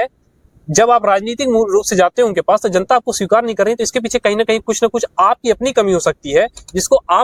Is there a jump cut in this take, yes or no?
no